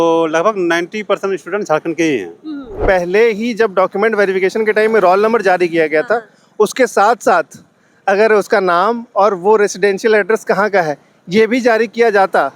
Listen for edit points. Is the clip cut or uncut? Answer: cut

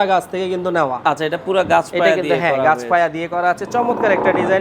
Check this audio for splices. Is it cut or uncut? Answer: uncut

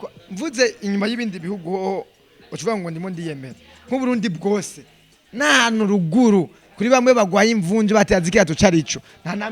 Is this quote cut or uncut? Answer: uncut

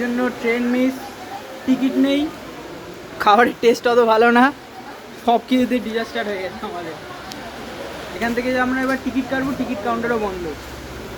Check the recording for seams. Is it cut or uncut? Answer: uncut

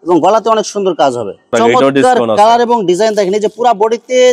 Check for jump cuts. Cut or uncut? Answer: cut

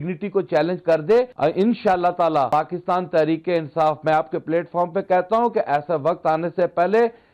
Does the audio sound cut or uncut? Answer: cut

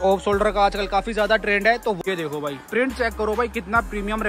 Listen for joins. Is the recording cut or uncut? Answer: cut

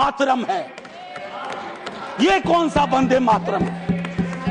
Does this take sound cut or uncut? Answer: uncut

